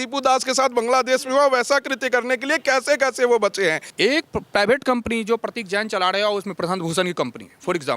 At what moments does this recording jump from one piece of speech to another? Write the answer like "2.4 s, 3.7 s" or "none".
3.9 s